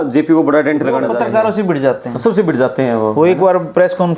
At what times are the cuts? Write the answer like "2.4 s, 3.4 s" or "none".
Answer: 1.1 s